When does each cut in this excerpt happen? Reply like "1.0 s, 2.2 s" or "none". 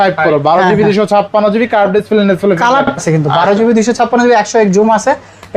2.9 s